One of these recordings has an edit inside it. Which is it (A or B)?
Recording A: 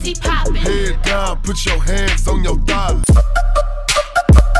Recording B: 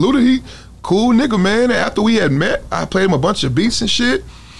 A